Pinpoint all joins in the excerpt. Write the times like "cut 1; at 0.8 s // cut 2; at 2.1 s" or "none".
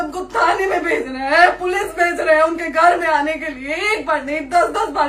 none